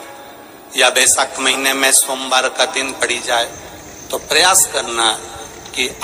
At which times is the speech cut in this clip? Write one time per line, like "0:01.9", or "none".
none

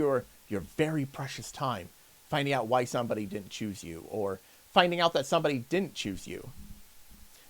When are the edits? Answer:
none

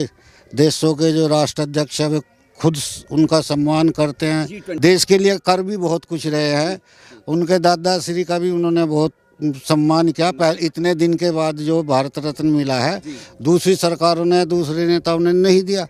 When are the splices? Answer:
0:04.6

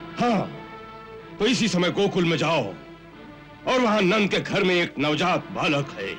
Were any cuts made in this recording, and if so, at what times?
none

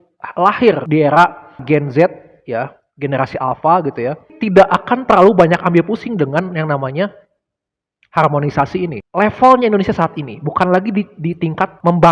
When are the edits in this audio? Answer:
0:04.3
0:09.0

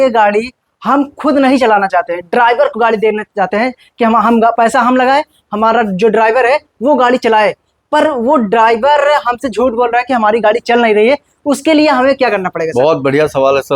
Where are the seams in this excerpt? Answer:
none

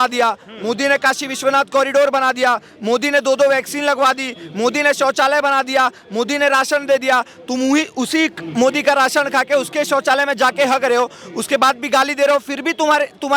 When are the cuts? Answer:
none

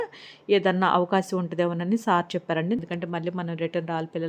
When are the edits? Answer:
0:02.8

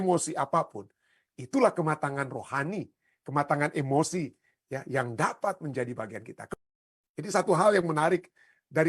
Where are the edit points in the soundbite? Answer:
0:06.5

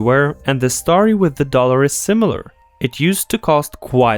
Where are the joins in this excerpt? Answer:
none

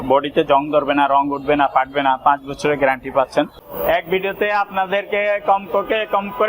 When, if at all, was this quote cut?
0:03.7

